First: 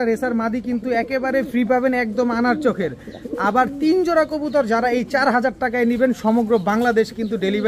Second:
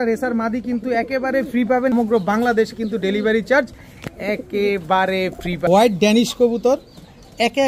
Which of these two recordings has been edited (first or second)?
second